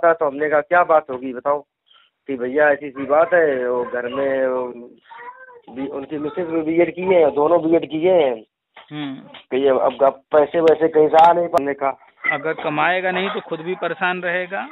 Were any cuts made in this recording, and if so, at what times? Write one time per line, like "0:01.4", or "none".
0:11.6